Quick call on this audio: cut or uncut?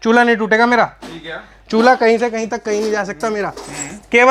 uncut